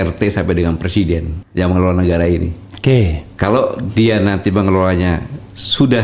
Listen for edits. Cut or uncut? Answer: cut